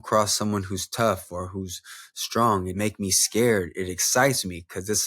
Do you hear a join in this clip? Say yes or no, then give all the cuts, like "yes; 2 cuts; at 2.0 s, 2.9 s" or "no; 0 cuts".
yes; 1 cut; at 2.7 s